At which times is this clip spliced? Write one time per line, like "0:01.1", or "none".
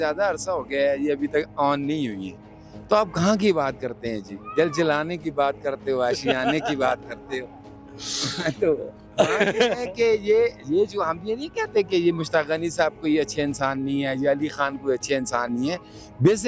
none